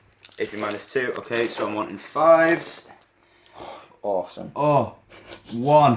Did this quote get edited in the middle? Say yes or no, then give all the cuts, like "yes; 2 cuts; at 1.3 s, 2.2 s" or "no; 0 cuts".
no; 0 cuts